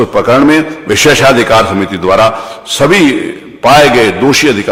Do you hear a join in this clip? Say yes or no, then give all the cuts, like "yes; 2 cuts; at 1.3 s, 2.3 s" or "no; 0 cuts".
no; 0 cuts